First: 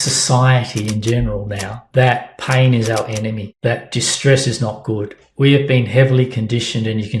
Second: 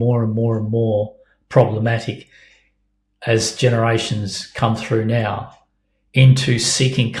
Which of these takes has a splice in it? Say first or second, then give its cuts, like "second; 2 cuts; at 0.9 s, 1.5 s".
first; 2 cuts; at 1.8 s, 3.5 s